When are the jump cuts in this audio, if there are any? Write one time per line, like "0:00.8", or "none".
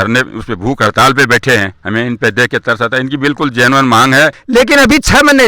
0:04.4